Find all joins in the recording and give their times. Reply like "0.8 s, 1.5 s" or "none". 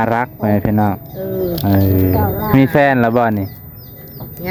none